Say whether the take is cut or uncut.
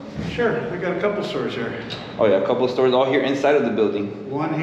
uncut